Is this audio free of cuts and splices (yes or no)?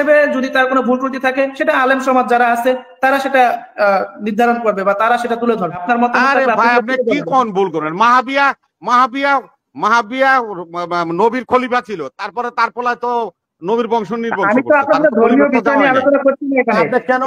no